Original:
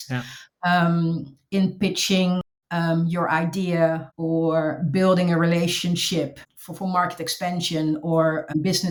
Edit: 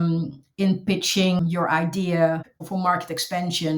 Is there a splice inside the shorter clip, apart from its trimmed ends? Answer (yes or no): yes